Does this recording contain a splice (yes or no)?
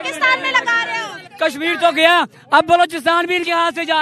yes